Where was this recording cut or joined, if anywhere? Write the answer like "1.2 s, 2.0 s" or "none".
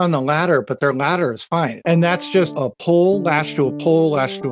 1.8 s, 2.5 s